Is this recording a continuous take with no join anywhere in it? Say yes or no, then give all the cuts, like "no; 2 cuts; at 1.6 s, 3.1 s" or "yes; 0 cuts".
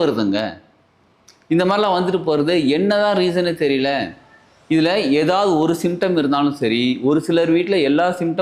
yes; 0 cuts